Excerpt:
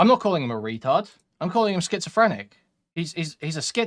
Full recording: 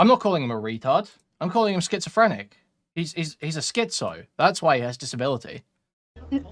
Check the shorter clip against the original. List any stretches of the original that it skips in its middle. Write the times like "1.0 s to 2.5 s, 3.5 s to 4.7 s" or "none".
none